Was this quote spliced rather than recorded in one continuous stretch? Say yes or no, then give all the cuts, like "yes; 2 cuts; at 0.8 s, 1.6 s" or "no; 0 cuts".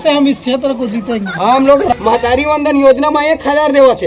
yes; 1 cut; at 1.9 s